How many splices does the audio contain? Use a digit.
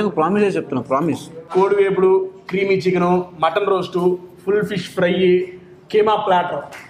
1